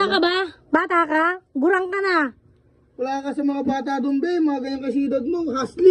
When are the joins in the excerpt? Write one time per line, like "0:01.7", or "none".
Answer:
none